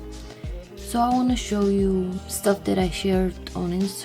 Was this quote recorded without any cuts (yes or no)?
no